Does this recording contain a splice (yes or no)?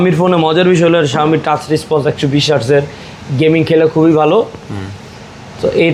no